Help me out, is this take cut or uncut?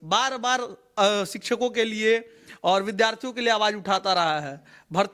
uncut